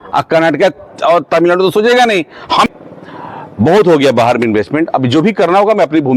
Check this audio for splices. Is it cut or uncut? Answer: cut